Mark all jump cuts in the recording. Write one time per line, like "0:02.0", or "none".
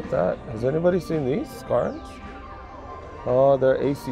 none